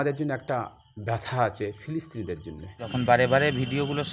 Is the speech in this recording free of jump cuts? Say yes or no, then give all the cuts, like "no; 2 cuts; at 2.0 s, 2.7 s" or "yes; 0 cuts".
no; 1 cut; at 2.8 s